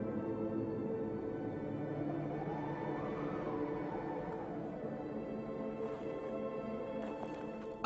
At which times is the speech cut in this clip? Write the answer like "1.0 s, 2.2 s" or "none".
5.2 s